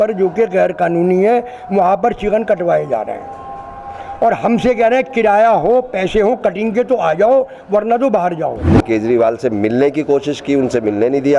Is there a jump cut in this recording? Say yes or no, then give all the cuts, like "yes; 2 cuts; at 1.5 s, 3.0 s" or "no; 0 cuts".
yes; 1 cut; at 8.7 s